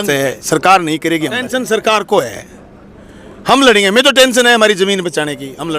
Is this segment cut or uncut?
cut